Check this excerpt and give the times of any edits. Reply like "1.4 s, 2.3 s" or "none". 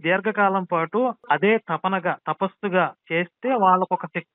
1.2 s, 3.0 s